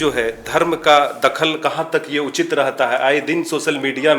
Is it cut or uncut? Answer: uncut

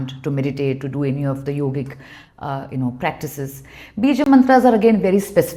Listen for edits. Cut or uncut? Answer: uncut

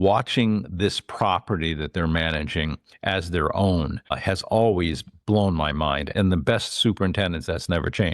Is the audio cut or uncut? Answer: cut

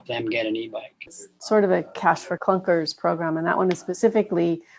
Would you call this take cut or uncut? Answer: cut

